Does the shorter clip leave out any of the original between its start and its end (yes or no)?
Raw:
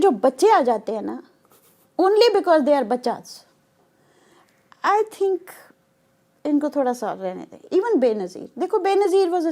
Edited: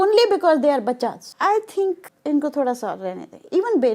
yes